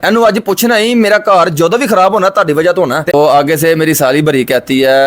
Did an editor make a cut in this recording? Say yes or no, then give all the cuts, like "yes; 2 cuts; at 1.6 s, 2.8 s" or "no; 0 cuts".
yes; 1 cut; at 3.1 s